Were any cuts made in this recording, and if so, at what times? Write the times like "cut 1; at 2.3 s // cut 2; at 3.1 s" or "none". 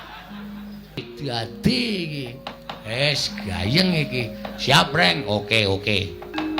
cut 1; at 1.1 s